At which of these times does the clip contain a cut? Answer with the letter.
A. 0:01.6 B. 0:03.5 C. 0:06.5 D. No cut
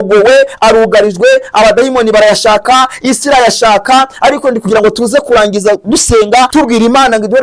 C